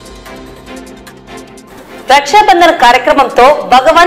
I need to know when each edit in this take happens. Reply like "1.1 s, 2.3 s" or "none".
none